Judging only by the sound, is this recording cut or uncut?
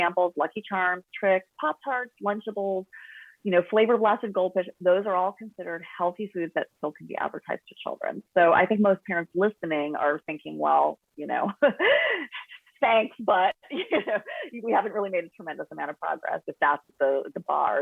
cut